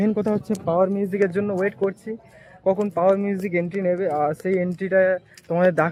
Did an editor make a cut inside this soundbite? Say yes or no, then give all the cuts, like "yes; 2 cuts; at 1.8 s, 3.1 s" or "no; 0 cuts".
no; 0 cuts